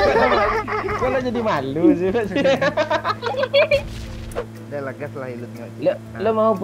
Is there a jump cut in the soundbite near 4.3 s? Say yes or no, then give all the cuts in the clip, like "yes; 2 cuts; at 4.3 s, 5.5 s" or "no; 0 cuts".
yes; 1 cut; at 4.3 s